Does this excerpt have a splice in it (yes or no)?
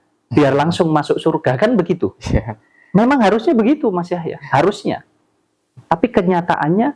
no